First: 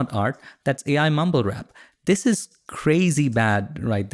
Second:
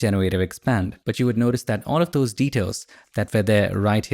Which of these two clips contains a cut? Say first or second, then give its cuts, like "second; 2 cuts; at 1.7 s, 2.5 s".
second; 1 cut; at 1.0 s